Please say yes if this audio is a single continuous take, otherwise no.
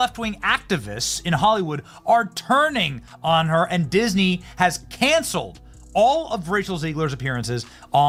yes